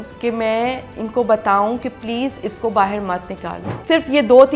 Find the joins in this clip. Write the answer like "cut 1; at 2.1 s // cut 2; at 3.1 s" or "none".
cut 1; at 3.7 s